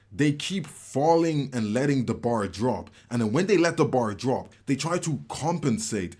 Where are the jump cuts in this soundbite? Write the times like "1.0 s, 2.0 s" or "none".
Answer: none